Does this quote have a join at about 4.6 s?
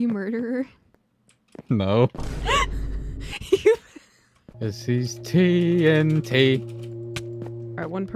yes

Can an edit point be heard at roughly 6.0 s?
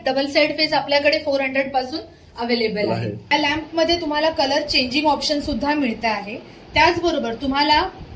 no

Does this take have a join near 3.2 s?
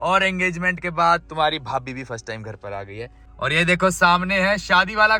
yes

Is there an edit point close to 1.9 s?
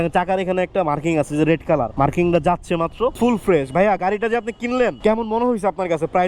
yes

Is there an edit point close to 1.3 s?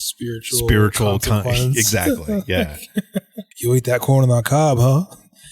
no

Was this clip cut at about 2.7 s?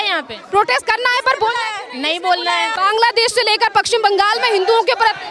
yes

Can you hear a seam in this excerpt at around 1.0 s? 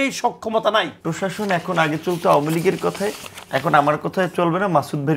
yes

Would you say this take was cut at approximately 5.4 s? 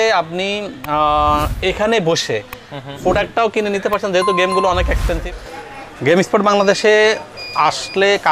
yes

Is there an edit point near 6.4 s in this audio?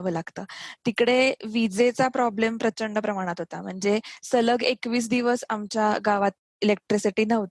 yes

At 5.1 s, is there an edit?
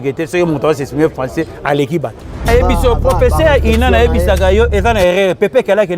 no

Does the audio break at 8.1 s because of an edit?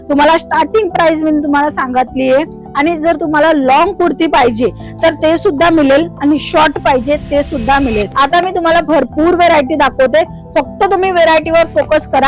yes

